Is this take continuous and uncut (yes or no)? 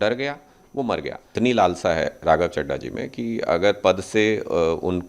no